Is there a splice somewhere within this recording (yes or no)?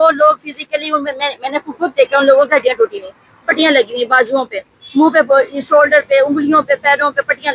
no